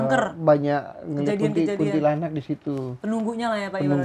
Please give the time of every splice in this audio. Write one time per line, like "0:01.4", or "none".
none